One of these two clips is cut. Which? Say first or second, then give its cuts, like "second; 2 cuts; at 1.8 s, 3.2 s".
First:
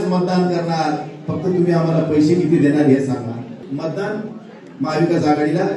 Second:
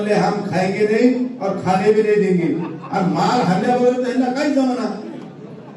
first; 1 cut; at 3.7 s